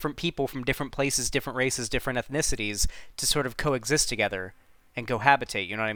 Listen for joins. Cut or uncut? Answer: uncut